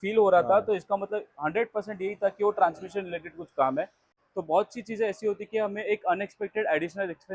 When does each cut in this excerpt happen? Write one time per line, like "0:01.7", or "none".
0:04.2

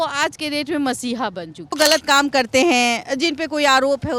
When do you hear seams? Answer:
0:01.8

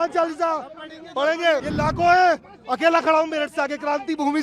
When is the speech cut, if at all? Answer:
0:01.7

